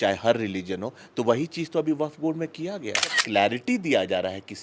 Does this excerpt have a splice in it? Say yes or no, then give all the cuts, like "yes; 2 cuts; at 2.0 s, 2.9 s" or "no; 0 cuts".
yes; 1 cut; at 3.2 s